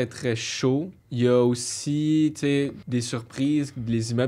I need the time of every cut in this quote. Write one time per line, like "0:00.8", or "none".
0:01.0
0:02.8